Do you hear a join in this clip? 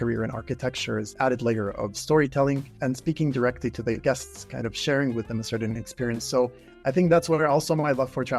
yes; 2 cuts; at 1.1 s, 2.7 s

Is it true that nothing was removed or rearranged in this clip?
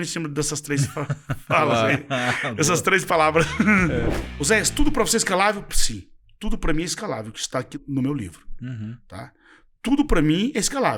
no; 1 cut; at 4.2 s

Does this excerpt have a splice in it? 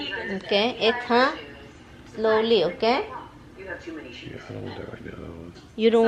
no; 0 cuts

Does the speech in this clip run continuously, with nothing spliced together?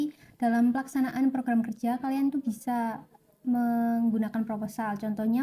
yes; 0 cuts

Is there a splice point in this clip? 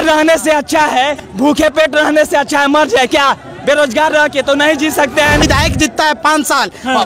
yes; 2 cuts; at 1.2 s, 5.4 s

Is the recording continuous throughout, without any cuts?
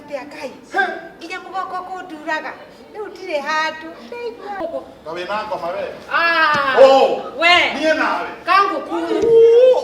no; 1 cut; at 4.5 s

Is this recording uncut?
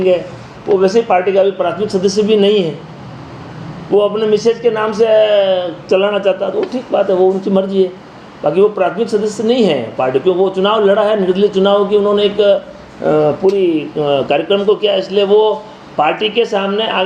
yes; 0 cuts

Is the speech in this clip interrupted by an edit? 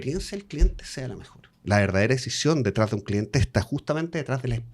yes; 1 cut; at 1.6 s

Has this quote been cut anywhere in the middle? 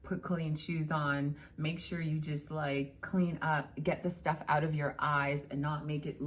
no; 0 cuts

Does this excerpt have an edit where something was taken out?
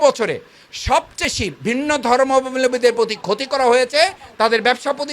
yes; 1 cut; at 1.2 s

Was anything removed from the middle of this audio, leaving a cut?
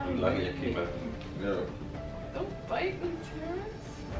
yes; 1 cut; at 2.2 s

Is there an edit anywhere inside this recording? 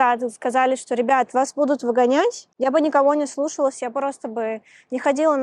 yes; 1 cut; at 2.5 s

